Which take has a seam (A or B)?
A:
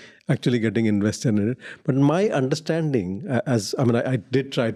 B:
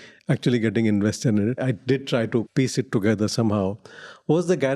B